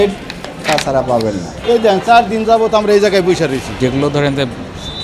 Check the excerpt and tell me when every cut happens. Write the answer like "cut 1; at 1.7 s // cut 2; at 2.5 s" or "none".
cut 1; at 1.5 s // cut 2; at 3.7 s

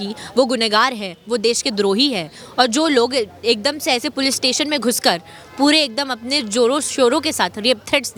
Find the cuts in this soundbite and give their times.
none

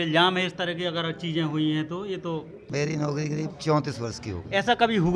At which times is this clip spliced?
cut 1; at 2.6 s

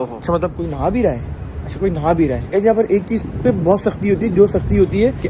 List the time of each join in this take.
none

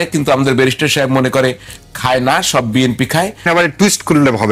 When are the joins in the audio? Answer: cut 1; at 3.4 s

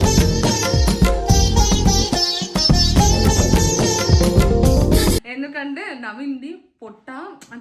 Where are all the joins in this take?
cut 1; at 5.3 s

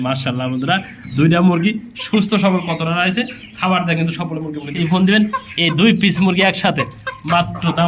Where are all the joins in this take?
cut 1; at 4.7 s

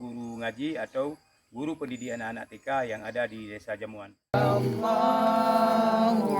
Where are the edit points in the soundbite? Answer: cut 1; at 4.3 s

